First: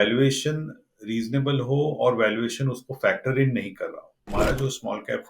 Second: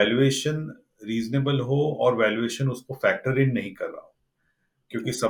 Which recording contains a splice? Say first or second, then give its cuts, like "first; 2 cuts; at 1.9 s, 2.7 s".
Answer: first; 1 cut; at 4.3 s